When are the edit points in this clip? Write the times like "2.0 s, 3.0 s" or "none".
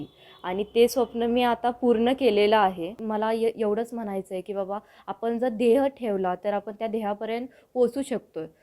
2.9 s